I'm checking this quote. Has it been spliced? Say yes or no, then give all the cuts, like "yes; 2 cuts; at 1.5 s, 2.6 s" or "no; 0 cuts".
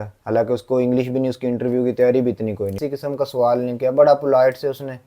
yes; 1 cut; at 2.8 s